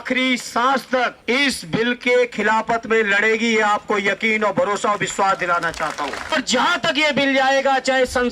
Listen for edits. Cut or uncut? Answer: cut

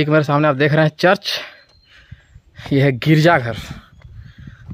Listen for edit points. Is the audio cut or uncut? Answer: uncut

